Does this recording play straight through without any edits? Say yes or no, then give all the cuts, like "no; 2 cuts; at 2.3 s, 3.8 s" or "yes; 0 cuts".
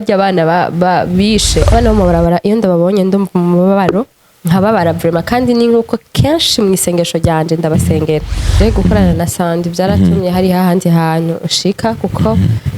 no; 2 cuts; at 1.7 s, 8.5 s